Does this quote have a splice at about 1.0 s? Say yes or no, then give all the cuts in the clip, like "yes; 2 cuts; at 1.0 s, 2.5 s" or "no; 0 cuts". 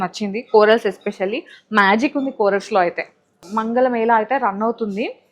no; 1 cut; at 3.5 s